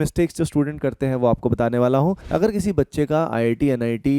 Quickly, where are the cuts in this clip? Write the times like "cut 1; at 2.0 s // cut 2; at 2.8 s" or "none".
cut 1; at 2.2 s